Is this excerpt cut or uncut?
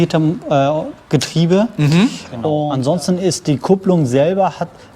cut